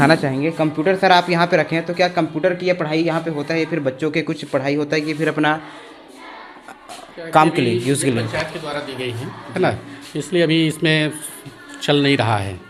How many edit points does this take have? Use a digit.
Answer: 0